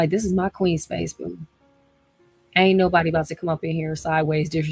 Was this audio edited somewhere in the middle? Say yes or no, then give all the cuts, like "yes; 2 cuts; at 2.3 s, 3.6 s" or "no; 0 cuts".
no; 0 cuts